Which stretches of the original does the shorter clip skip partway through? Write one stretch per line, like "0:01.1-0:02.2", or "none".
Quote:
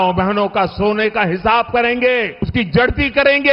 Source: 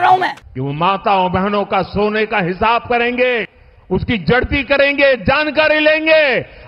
0:03.6-0:04.0